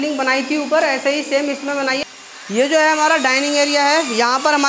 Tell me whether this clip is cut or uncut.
cut